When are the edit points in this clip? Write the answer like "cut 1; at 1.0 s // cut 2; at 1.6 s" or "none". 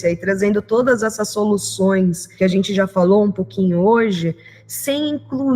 cut 1; at 2.2 s

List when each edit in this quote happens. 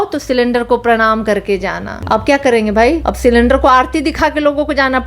cut 1; at 1.9 s // cut 2; at 3.1 s

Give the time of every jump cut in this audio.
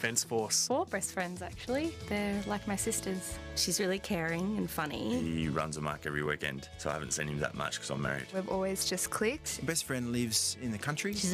none

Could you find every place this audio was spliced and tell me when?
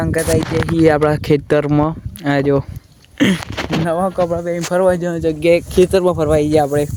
none

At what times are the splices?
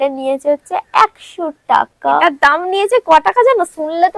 cut 1; at 2.2 s

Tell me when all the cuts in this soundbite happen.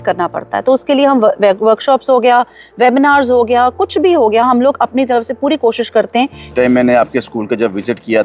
cut 1; at 6.5 s

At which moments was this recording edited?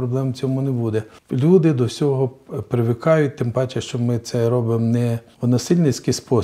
cut 1; at 1.2 s // cut 2; at 5.3 s

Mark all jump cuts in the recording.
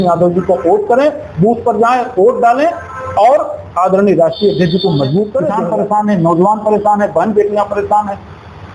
cut 1; at 5.5 s

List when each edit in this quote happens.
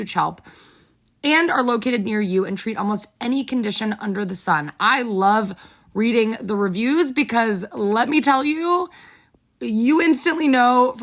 none

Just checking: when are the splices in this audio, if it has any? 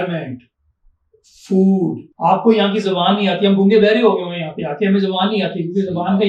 cut 1; at 2.1 s

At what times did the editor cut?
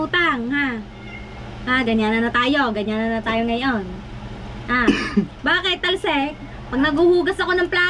none

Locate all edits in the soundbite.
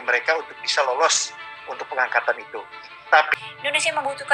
cut 1; at 3.4 s

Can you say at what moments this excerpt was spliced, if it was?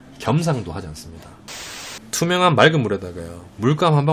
cut 1; at 1.5 s

